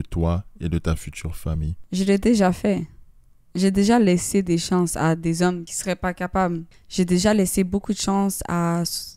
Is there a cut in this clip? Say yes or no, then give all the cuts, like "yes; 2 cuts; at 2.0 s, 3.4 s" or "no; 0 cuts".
yes; 3 cuts; at 1.8 s, 5.7 s, 6.8 s